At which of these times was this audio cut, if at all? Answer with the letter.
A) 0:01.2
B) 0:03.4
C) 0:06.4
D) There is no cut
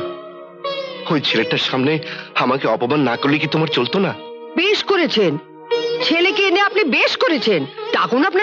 D